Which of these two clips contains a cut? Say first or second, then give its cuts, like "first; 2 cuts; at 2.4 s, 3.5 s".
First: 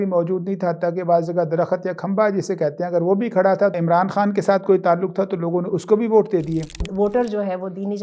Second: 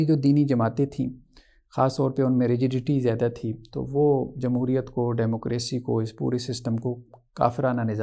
first; 2 cuts; at 3.7 s, 6.9 s